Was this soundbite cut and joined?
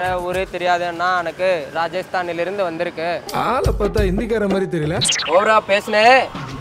yes; 1 cut; at 5.1 s

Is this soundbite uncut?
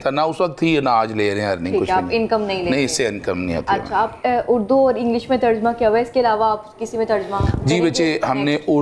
yes; 0 cuts

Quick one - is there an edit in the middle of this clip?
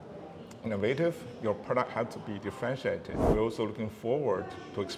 yes; 1 cut; at 3.2 s

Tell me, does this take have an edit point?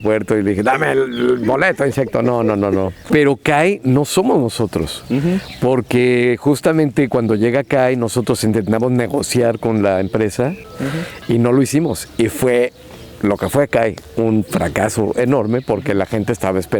yes; 2 cuts; at 3.1 s, 10.6 s

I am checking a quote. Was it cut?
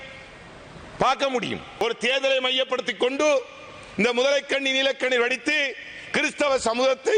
yes; 1 cut; at 1.7 s

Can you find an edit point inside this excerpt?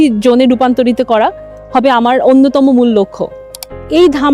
yes; 1 cut; at 3.4 s

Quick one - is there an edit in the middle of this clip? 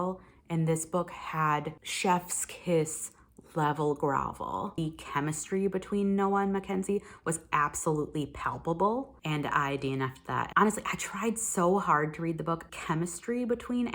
yes; 5 cuts; at 1.8 s, 4.7 s, 9.2 s, 10.5 s, 12.6 s

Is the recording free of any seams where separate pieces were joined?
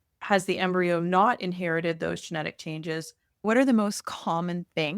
no; 1 cut; at 3.4 s

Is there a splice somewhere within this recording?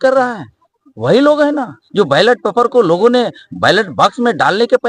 no; 0 cuts

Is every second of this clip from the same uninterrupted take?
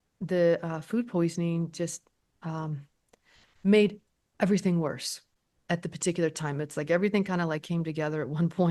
yes; 0 cuts

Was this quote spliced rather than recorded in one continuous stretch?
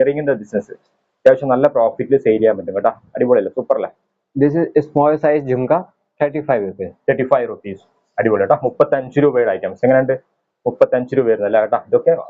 no; 0 cuts

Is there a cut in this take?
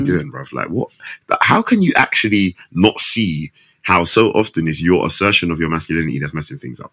no; 0 cuts

